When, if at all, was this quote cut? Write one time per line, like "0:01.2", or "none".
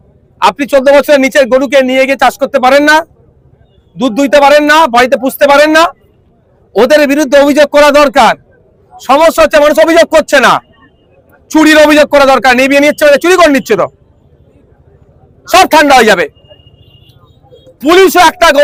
none